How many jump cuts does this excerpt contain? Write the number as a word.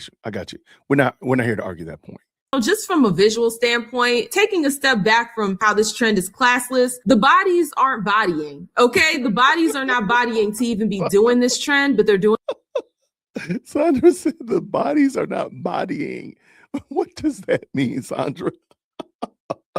one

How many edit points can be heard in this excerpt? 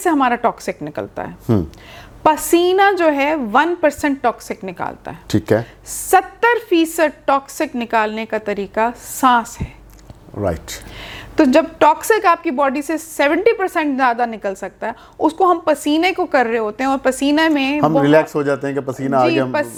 zero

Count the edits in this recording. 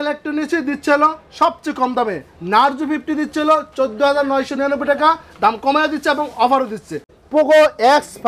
one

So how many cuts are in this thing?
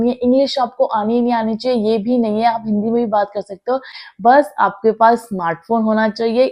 one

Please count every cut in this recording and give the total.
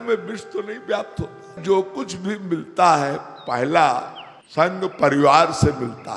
one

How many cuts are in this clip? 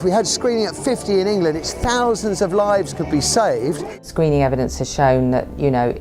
one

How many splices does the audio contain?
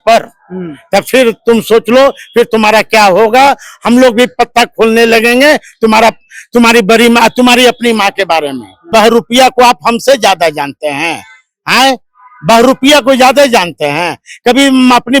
one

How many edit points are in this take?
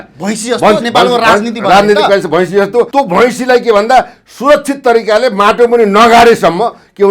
one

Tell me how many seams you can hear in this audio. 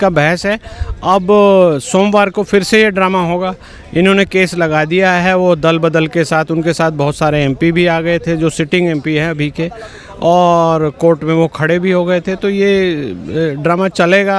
zero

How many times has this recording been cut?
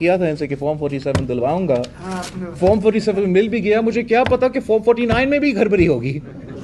zero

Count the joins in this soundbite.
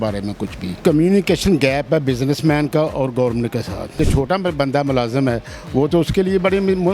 two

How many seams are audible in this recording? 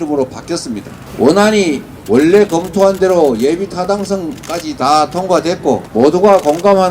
three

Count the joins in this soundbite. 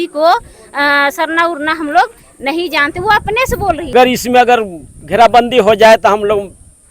one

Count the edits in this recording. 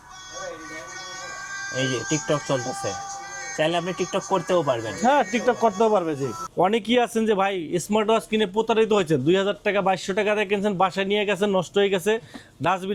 one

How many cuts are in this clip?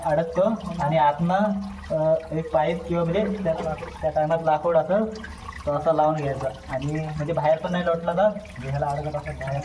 zero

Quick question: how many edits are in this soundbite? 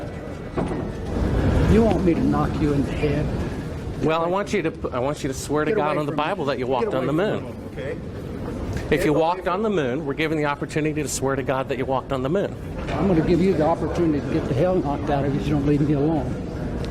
one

